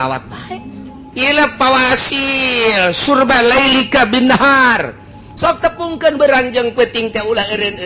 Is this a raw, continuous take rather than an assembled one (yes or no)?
no